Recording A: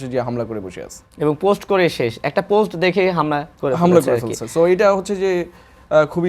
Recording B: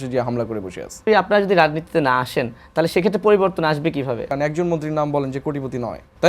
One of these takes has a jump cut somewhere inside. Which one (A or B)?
B